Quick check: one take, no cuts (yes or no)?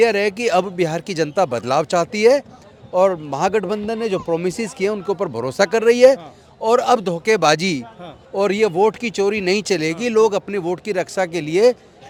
yes